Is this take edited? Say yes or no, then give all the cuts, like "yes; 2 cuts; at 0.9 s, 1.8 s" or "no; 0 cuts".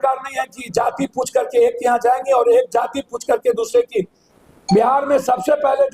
yes; 1 cut; at 4.2 s